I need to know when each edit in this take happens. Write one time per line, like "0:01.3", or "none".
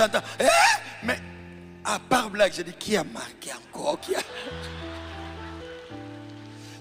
none